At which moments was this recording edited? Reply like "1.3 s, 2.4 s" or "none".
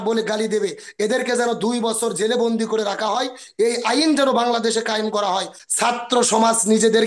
5.6 s